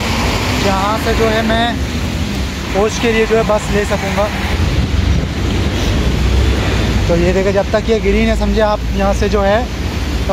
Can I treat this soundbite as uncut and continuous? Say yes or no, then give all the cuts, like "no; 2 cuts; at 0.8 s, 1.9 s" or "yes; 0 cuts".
yes; 0 cuts